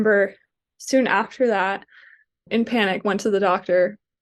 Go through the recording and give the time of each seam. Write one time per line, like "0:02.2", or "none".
0:02.5